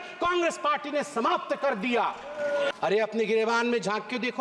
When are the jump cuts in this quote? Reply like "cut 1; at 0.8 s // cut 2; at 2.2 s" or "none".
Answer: cut 1; at 2.7 s

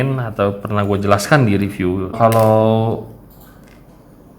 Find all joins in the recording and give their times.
cut 1; at 2.2 s

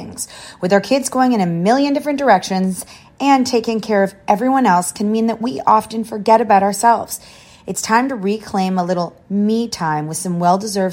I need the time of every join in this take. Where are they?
none

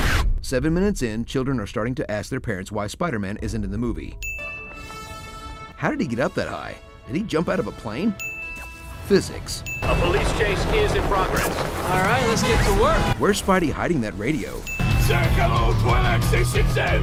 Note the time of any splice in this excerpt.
none

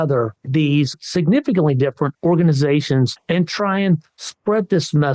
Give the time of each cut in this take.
cut 1; at 1.0 s // cut 2; at 2.1 s // cut 3; at 3.2 s

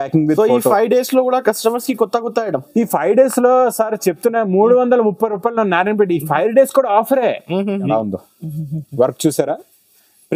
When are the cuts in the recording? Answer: cut 1; at 7.9 s

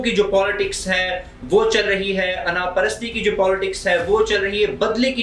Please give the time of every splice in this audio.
none

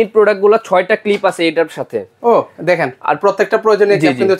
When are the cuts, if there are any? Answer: none

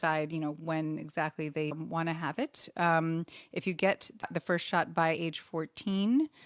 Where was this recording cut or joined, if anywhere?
cut 1; at 1.7 s // cut 2; at 4.2 s

